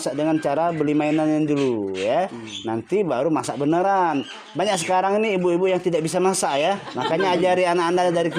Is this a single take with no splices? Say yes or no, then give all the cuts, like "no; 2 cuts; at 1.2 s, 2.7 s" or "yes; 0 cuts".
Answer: yes; 0 cuts